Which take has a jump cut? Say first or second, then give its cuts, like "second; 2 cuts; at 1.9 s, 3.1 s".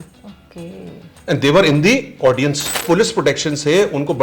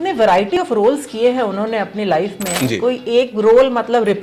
first; 1 cut; at 2.8 s